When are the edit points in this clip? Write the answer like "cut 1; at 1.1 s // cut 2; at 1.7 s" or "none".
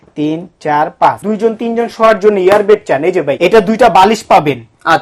cut 1; at 1.2 s // cut 2; at 3.3 s